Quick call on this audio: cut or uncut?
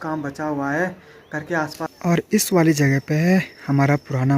cut